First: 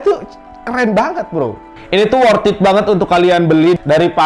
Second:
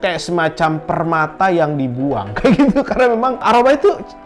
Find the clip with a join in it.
first; 1 cut; at 1.7 s

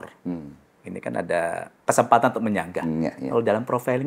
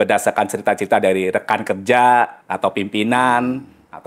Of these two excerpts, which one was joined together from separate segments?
first; 1 cut; at 1.7 s

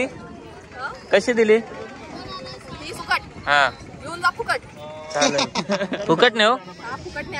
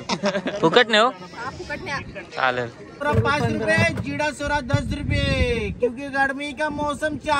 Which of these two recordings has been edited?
second; 1 cut; at 3.0 s

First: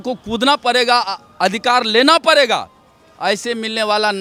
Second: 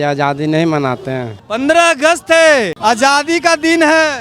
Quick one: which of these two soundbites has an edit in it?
second; 2 cuts; at 1.4 s, 2.7 s

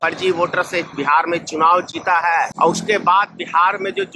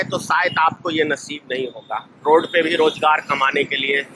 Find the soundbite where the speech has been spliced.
first; 1 cut; at 2.5 s

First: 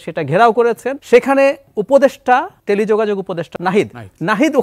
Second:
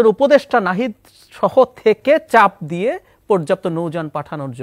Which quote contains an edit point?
first; 3 cuts; at 0.9 s, 2.5 s, 3.5 s

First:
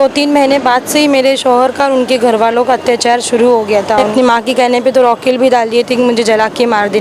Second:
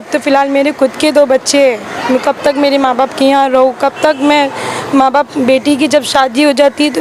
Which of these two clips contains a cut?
first; 1 cut; at 4.1 s

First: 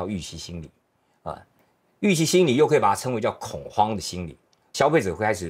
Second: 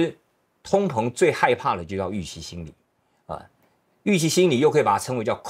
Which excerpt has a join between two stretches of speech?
first; 1 cut; at 4.6 s

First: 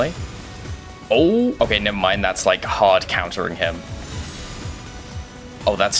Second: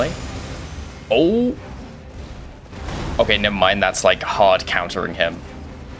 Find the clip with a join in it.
first; 2 cuts; at 1.6 s, 3.8 s

